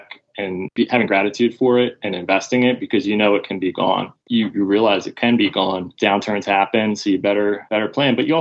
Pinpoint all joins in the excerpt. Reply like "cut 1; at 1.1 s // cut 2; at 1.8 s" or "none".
cut 1; at 4.2 s